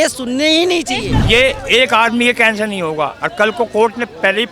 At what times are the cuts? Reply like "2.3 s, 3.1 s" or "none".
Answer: 1.1 s